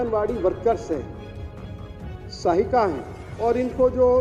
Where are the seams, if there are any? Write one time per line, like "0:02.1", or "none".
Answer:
0:03.2